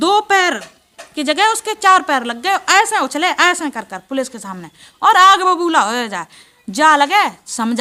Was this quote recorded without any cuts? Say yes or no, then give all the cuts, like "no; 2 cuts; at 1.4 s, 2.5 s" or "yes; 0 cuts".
yes; 0 cuts